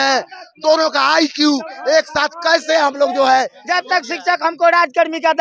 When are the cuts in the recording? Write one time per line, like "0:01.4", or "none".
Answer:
0:03.6